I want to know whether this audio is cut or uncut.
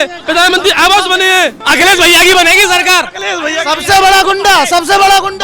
cut